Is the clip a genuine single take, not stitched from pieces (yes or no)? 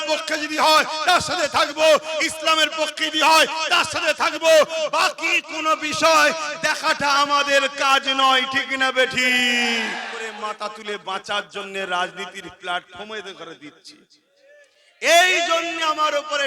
no